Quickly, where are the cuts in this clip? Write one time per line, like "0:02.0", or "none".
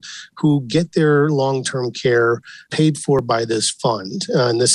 0:02.8